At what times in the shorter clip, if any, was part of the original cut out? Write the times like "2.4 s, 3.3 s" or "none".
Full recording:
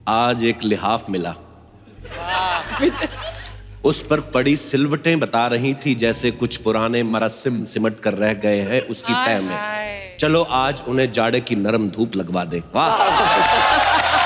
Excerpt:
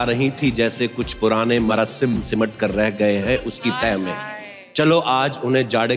none